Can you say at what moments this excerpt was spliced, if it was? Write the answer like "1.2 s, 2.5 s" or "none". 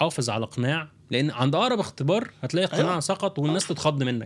none

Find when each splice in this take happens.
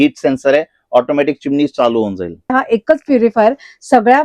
2.5 s

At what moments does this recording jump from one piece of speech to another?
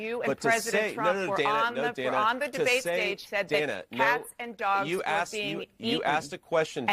3.2 s

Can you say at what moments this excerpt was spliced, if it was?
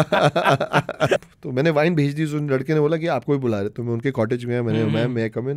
1.2 s

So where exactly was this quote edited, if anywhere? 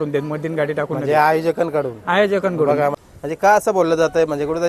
3.0 s

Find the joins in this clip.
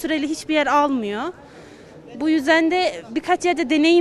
none

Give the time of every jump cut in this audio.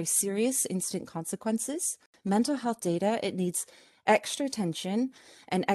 2.1 s

